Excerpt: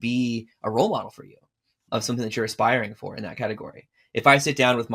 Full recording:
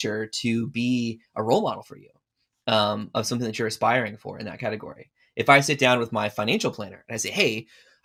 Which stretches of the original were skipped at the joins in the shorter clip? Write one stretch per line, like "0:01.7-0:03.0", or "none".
0:02.5-0:03.0